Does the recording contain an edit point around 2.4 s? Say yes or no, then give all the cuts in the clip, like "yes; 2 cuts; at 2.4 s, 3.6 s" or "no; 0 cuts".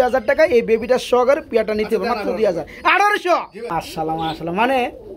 no; 1 cut; at 3.7 s